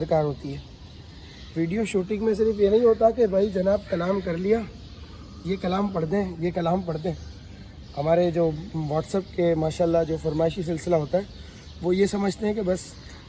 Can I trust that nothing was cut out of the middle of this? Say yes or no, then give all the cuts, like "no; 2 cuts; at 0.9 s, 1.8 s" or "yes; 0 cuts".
yes; 0 cuts